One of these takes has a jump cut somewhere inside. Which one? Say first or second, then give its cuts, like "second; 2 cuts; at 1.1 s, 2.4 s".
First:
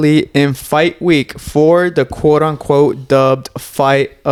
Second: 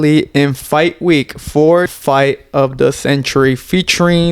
second; 1 cut; at 1.9 s